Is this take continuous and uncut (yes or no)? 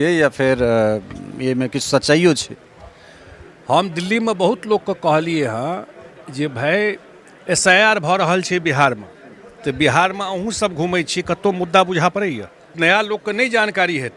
no